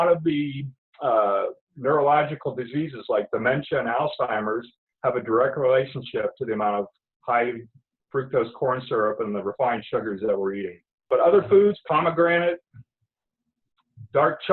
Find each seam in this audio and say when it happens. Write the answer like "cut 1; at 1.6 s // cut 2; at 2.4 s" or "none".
cut 1; at 11.1 s